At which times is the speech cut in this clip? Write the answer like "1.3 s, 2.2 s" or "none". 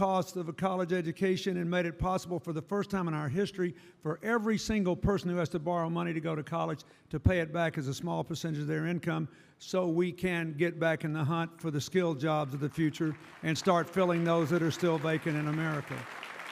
2.2 s